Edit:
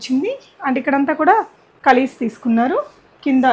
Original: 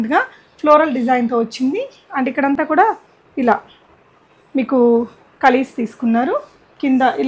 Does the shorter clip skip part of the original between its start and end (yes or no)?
yes